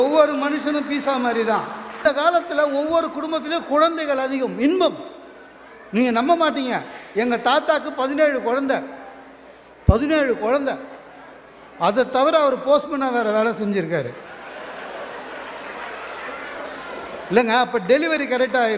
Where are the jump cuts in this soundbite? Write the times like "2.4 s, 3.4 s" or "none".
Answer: 2.0 s